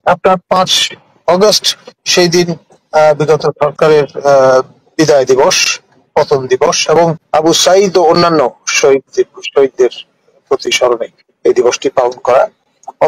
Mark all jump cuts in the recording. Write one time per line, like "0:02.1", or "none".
0:07.2

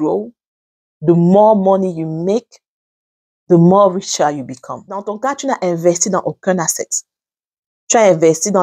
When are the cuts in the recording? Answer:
0:05.0

